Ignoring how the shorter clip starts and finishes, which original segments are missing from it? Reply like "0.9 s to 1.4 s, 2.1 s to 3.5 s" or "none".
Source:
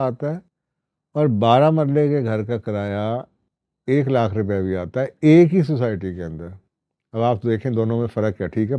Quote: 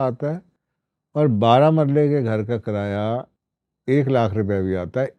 none